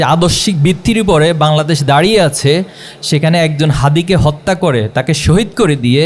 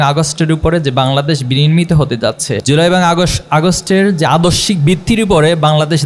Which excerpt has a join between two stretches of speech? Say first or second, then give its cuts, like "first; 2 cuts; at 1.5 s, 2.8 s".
second; 1 cut; at 2.5 s